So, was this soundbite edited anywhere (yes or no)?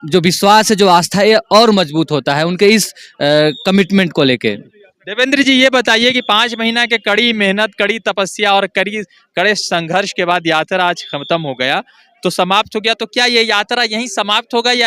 no